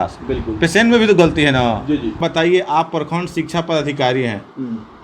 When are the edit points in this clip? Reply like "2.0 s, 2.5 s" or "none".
2.2 s